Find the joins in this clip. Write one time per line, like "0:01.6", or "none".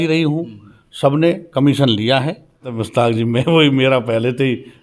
0:02.8